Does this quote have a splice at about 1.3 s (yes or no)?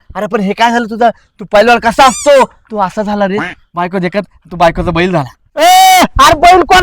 no